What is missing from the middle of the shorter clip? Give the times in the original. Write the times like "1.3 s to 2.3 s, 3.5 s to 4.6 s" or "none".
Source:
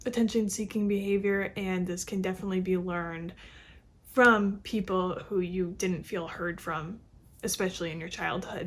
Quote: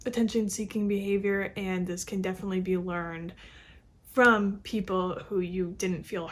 none